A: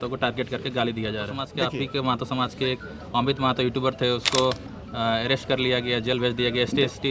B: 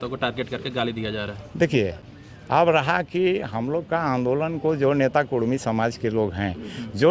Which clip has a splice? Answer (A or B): A